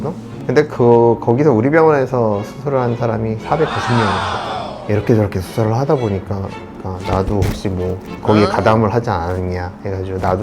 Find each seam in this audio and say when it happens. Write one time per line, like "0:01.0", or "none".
0:04.7
0:06.7